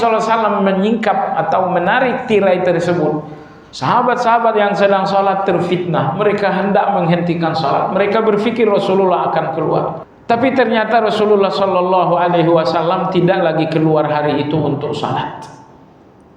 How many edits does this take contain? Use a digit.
1